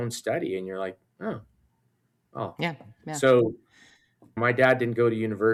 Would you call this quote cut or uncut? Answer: uncut